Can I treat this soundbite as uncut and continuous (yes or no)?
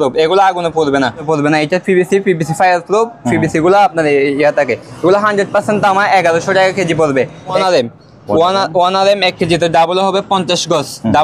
no